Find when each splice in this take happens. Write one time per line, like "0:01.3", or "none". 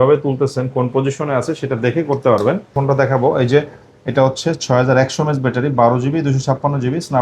0:02.7